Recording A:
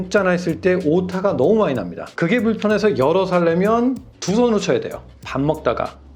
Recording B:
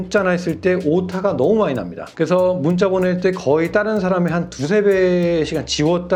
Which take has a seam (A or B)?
A